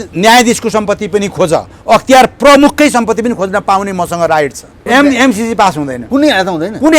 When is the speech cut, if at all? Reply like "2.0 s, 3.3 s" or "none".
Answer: 4.7 s, 5.9 s